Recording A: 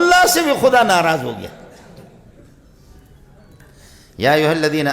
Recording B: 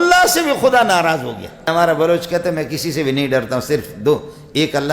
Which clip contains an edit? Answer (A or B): B